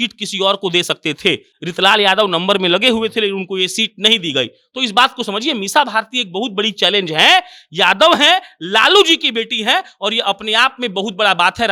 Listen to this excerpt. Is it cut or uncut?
uncut